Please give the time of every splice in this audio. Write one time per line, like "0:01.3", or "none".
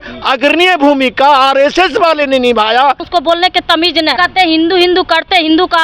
0:03.0
0:04.1